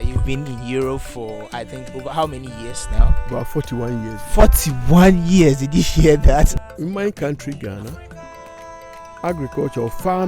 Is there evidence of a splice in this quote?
yes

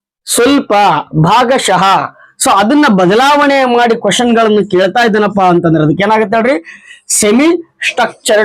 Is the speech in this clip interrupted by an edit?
no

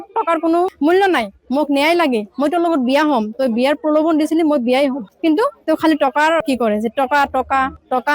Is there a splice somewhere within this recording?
no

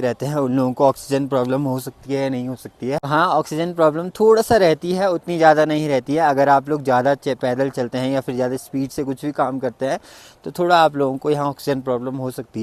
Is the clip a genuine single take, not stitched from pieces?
yes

